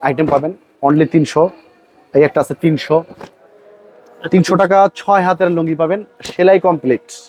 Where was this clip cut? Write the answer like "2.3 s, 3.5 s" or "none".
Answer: none

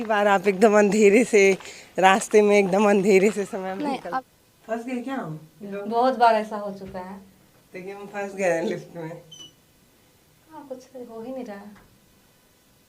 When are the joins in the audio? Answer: 4.1 s, 5.8 s

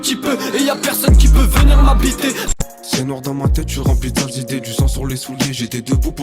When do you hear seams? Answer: 2.5 s

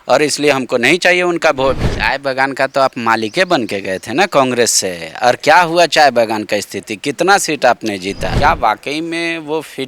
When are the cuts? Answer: 1.9 s, 8.3 s

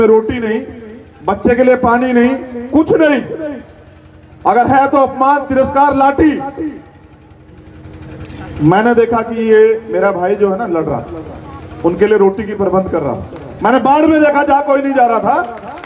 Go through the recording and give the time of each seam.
none

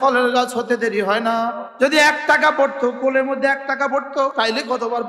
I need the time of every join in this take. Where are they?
1.6 s

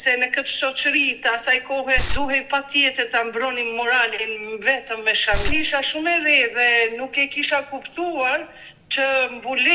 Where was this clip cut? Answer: 2.1 s, 5.5 s

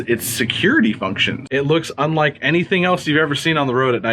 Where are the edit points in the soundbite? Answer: 1.3 s

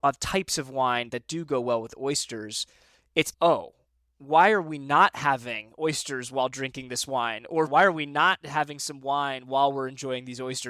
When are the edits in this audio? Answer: 7.7 s

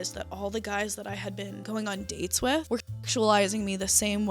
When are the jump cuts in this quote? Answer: 1.6 s, 2.7 s

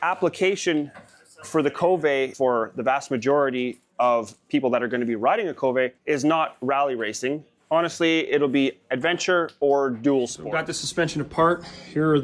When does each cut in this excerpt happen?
2.3 s, 6.0 s, 7.5 s, 10.4 s

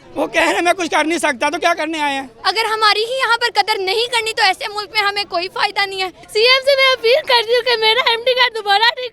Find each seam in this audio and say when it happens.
2.3 s, 6.2 s

